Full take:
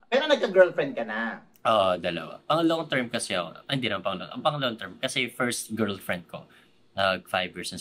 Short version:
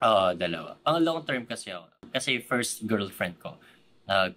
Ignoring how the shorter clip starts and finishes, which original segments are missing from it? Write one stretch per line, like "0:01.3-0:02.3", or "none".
0:03.6-0:04.8